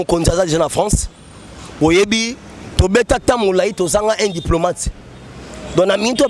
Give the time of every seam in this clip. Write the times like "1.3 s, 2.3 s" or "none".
none